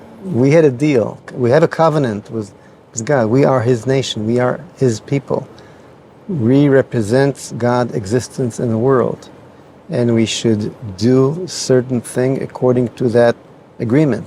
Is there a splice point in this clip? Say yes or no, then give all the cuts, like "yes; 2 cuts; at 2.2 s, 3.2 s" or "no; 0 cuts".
yes; 1 cut; at 1.3 s